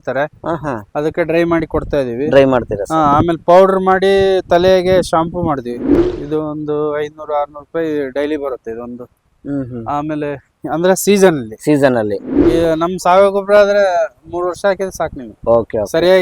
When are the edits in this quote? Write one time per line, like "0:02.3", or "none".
0:05.9
0:12.3

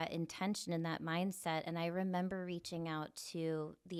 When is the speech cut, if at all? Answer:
none

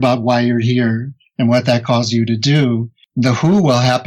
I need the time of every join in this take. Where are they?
0:03.0

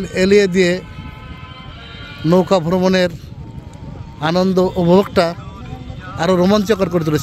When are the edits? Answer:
none

